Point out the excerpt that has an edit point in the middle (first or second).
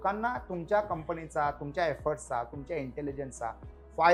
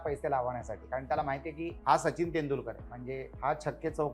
second